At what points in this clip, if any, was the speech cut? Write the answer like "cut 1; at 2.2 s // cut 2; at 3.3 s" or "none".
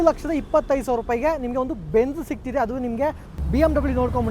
cut 1; at 3.4 s